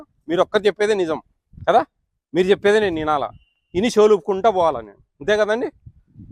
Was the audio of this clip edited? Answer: no; 0 cuts

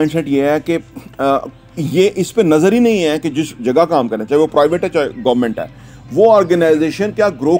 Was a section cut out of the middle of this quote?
no; 0 cuts

